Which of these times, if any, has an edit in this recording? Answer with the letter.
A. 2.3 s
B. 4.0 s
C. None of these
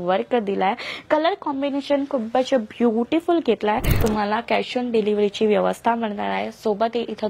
B